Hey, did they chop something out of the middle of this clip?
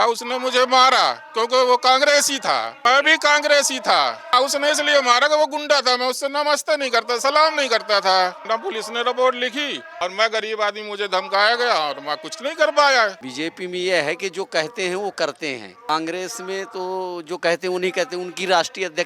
yes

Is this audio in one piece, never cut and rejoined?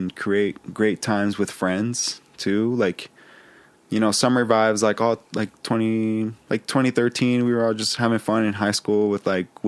yes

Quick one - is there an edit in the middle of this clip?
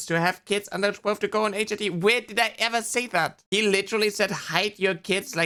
no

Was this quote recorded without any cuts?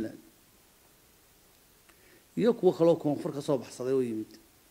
yes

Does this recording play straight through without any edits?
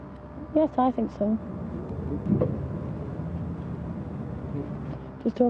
yes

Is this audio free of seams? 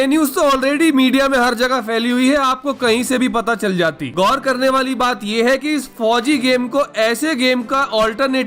yes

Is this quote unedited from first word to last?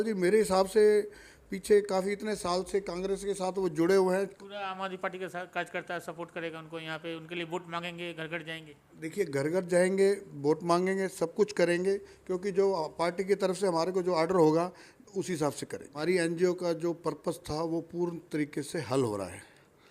no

